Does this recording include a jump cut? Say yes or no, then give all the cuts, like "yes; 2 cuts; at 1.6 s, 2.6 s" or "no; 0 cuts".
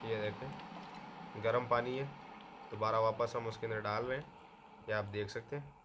no; 0 cuts